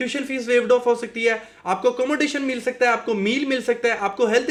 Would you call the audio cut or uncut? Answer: uncut